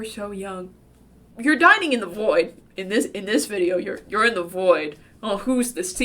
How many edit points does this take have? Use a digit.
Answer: 1